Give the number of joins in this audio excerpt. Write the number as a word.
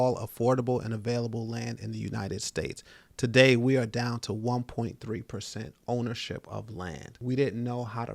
one